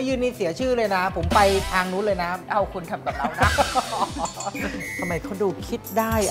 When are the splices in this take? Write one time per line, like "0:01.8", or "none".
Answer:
0:02.4
0:04.8